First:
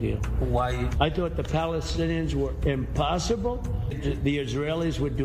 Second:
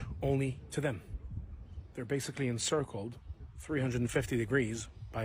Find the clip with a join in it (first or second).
first